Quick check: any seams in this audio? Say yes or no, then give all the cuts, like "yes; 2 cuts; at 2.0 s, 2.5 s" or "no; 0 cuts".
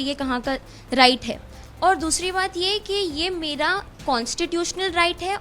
no; 0 cuts